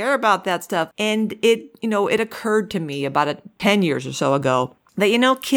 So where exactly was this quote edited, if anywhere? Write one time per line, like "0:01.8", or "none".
0:00.9
0:03.4